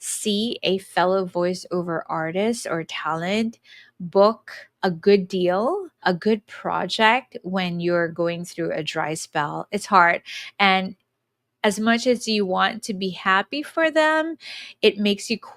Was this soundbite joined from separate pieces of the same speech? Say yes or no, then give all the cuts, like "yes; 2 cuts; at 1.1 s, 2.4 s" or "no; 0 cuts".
no; 0 cuts